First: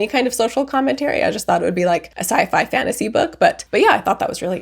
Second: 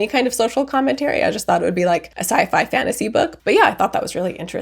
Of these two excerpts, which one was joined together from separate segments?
second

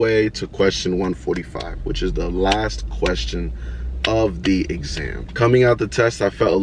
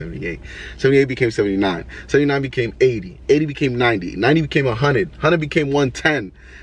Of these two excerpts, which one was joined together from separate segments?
first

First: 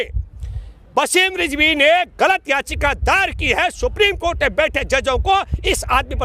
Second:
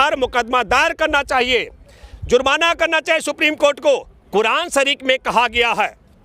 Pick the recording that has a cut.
second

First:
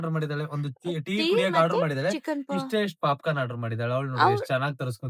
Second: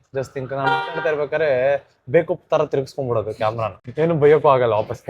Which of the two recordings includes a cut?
second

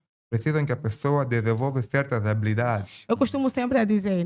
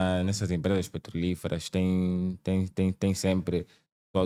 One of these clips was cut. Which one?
first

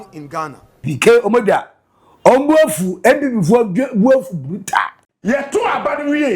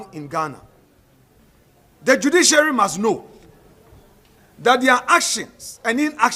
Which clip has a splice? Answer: first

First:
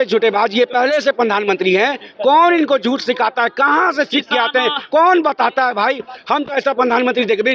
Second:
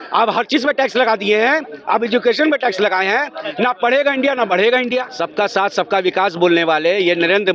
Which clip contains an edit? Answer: second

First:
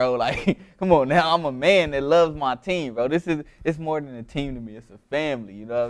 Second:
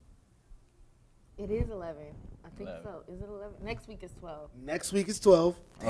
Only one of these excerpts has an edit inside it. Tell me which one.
first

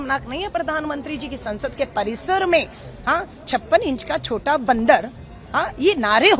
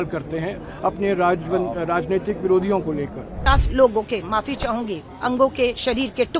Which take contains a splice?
second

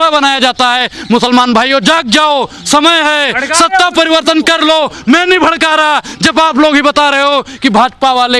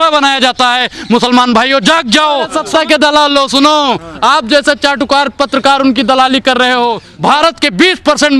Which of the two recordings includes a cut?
second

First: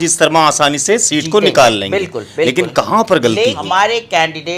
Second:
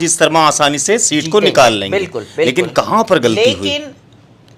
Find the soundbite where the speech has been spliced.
first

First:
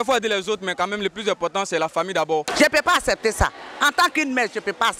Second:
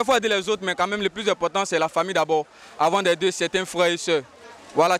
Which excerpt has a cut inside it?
first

